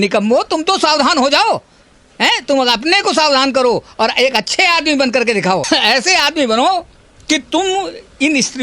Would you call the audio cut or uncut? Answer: uncut